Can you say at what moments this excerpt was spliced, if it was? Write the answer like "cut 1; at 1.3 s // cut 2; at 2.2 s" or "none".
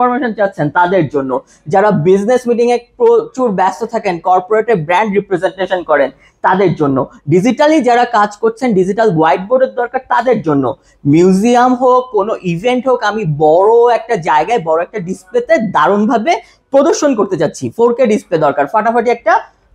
none